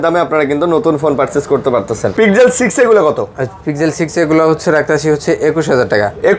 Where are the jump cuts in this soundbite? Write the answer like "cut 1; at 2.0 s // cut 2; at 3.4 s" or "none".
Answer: cut 1; at 2.1 s